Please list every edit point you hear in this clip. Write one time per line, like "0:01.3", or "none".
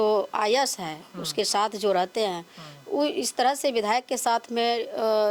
none